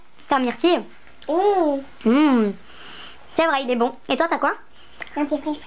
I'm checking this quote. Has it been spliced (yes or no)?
no